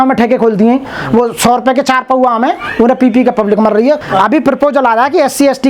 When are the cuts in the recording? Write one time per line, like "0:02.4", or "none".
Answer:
0:04.0